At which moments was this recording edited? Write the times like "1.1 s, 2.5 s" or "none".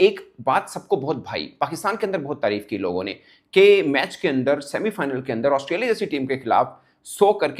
none